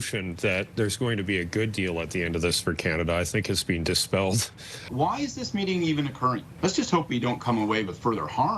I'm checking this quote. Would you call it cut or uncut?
cut